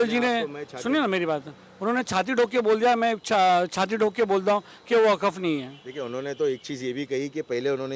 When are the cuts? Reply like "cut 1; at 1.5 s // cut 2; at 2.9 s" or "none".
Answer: none